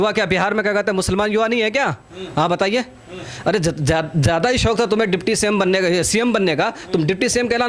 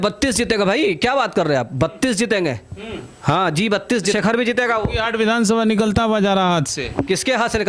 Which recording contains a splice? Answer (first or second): second